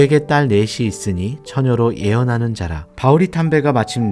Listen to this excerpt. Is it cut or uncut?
uncut